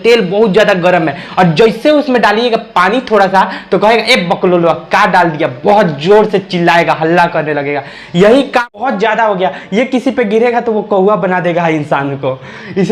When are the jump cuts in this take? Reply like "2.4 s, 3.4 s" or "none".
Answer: 8.8 s